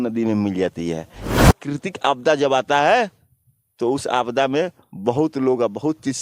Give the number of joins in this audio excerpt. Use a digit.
1